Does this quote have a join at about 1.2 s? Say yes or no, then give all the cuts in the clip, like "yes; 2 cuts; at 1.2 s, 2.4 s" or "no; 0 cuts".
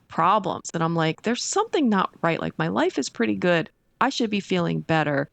no; 0 cuts